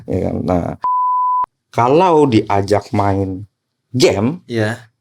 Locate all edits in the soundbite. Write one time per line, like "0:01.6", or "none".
0:01.1